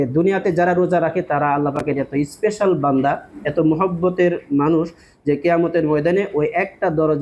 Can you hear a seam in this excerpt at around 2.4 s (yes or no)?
no